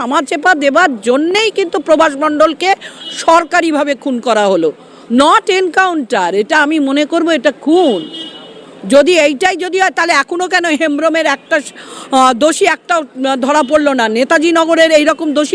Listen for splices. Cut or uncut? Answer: uncut